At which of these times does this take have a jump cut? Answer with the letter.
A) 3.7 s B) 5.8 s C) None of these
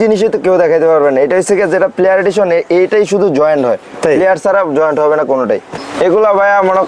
B